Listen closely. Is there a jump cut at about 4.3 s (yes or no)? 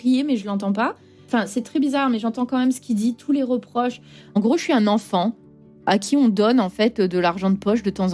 yes